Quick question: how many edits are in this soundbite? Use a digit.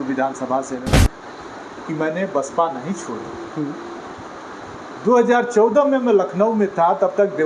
1